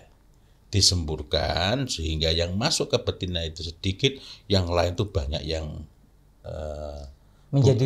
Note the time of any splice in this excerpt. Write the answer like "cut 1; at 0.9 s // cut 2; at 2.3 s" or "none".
none

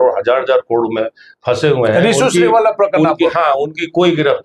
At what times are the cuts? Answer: none

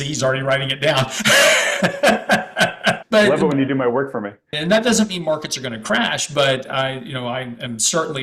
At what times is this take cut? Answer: cut 1; at 3.0 s // cut 2; at 4.5 s

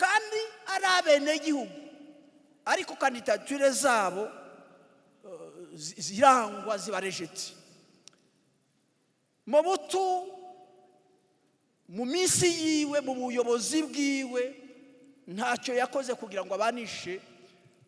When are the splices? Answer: none

